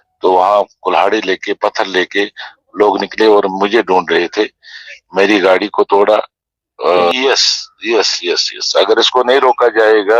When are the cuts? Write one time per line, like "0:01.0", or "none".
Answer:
0:06.9